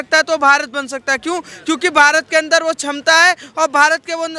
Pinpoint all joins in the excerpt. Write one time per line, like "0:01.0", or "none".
none

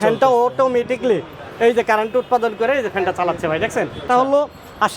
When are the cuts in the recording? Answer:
0:04.0

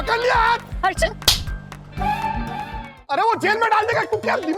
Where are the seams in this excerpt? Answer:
0:03.0

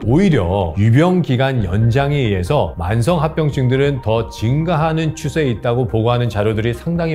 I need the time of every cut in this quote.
none

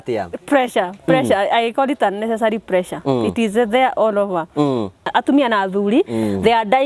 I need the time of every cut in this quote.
0:05.1

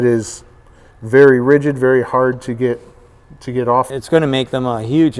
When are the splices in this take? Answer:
0:04.0

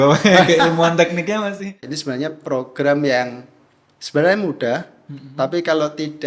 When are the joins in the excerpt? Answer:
0:01.5

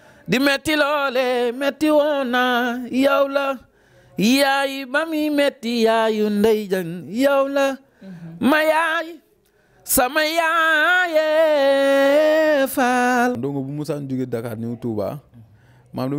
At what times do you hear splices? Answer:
0:13.4

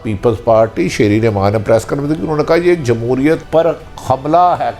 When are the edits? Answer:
0:03.4

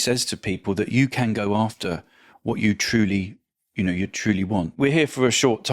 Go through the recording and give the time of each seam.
0:04.8

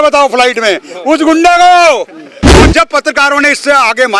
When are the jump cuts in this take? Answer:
0:02.6

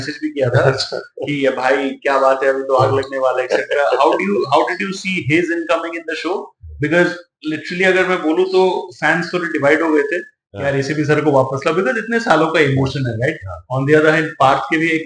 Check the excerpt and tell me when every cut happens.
none

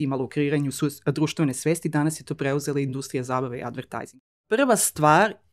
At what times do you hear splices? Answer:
0:04.3

